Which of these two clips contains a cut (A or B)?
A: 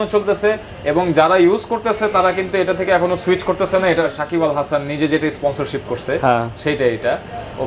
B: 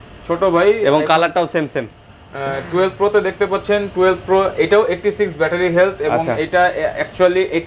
A